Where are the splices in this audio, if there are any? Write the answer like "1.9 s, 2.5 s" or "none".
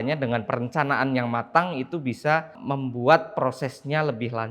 2.6 s